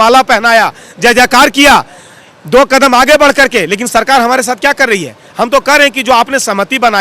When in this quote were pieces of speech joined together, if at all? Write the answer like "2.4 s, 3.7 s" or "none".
none